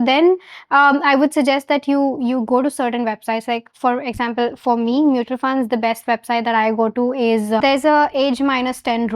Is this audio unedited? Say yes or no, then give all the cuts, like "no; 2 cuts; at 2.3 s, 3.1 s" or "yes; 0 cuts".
no; 1 cut; at 7.6 s